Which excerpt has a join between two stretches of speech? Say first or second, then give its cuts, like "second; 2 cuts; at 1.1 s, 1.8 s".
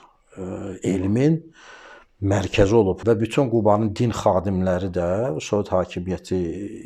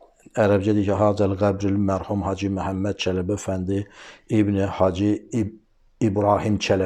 first; 1 cut; at 3.0 s